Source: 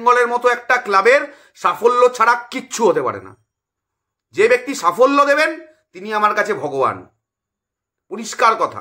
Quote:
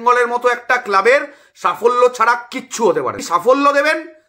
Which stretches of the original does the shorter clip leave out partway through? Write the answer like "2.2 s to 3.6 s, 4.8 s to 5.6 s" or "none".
3.2 s to 4.7 s